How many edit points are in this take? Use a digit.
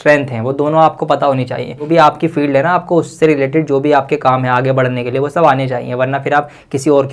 1